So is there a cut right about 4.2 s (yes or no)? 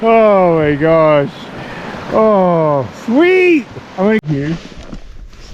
yes